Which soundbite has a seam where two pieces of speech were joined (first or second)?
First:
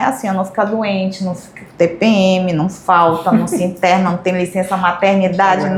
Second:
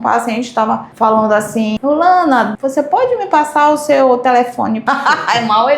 second